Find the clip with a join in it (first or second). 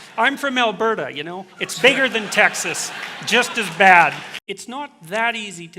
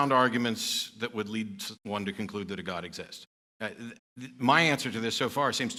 first